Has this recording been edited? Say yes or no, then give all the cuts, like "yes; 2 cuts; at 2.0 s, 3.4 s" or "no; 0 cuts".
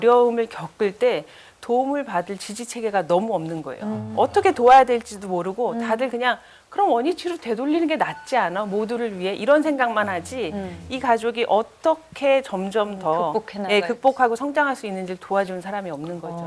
no; 0 cuts